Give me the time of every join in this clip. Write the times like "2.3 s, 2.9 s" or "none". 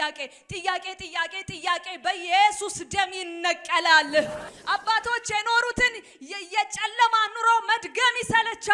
4.5 s